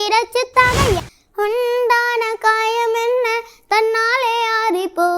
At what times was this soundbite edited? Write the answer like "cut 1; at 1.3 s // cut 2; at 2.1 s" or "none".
cut 1; at 1.0 s